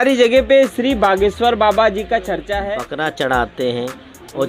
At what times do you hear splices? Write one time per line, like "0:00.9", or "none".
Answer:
0:02.5